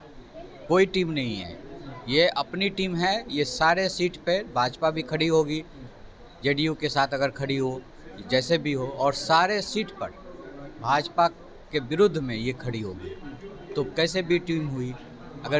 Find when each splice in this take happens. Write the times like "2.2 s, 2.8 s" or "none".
none